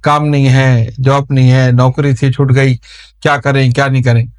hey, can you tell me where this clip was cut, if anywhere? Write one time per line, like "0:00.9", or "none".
none